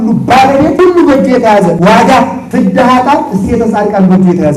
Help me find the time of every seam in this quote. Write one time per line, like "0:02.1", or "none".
0:00.8
0:01.8
0:02.4